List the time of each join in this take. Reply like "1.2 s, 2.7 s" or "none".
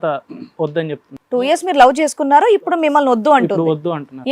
1.0 s